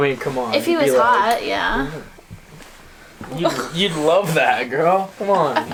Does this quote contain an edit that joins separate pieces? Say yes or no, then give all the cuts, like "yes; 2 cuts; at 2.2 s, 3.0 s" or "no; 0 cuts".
no; 0 cuts